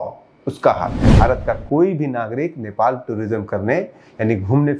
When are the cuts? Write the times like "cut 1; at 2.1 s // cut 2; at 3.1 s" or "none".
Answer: cut 1; at 1.1 s